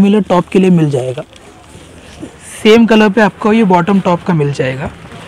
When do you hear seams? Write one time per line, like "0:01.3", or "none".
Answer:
none

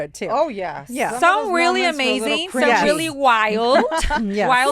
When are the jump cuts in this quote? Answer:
none

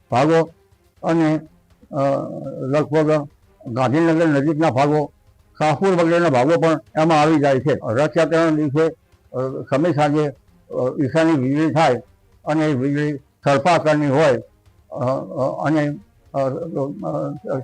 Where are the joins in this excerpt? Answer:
0:07.8

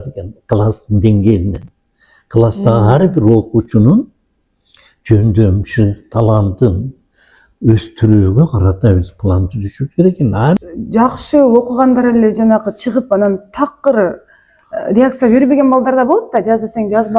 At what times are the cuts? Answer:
0:10.6

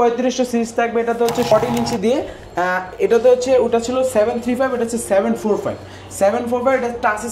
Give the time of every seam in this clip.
0:01.5

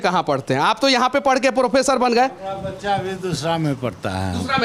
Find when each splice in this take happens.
none

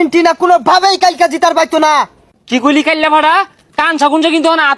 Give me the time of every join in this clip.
0:02.2

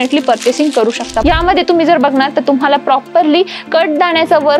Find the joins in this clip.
0:01.1

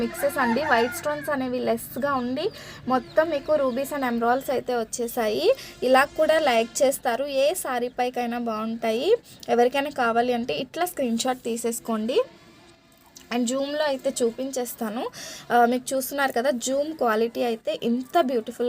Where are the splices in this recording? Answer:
none

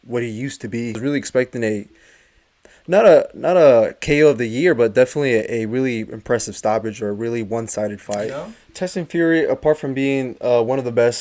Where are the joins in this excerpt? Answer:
0:01.0
0:08.3

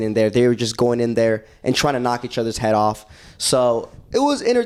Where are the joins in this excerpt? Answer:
none

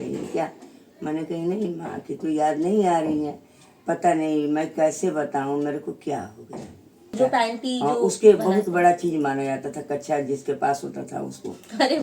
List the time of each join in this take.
0:07.1

